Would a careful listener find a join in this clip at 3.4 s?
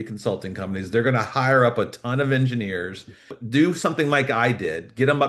yes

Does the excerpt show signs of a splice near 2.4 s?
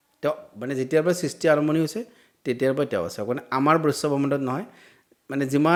no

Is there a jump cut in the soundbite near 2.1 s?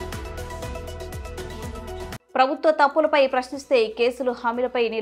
yes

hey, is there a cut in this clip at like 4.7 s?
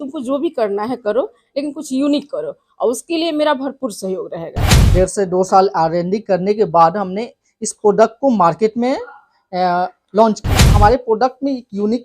yes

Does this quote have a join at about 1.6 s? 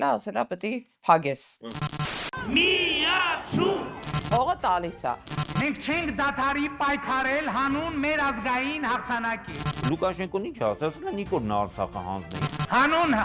yes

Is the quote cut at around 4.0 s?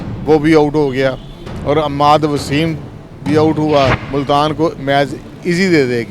yes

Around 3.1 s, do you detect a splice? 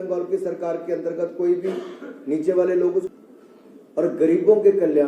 yes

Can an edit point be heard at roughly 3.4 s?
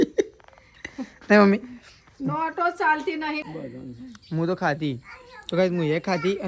yes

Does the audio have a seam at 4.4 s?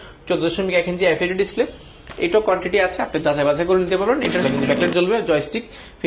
yes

